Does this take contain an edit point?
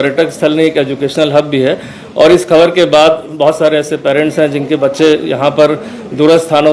no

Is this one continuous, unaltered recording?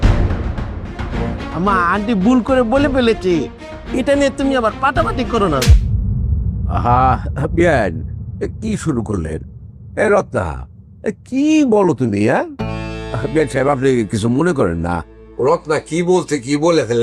no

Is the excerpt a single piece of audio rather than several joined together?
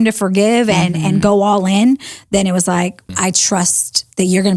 no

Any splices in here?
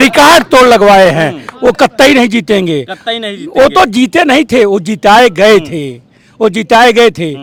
no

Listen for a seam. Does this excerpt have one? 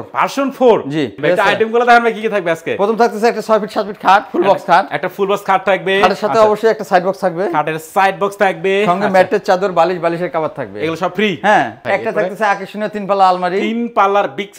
yes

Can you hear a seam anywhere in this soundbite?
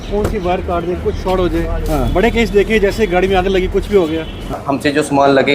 yes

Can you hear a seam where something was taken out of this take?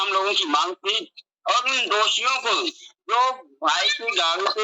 no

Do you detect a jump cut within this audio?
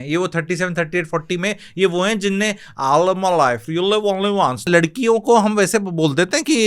yes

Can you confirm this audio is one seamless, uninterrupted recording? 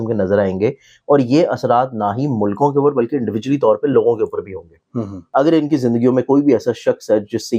no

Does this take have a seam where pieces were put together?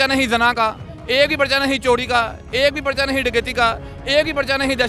no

